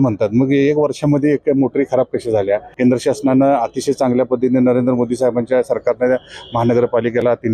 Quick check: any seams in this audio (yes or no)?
yes